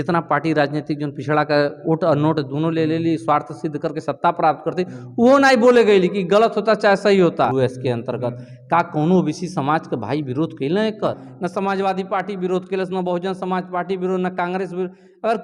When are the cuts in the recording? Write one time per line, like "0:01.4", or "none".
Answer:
0:07.5
0:11.3